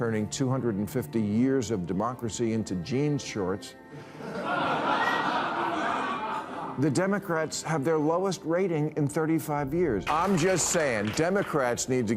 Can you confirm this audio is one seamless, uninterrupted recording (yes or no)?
no